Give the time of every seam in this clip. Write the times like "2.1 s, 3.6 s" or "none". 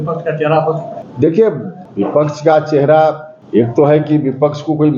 1.0 s, 1.8 s, 3.3 s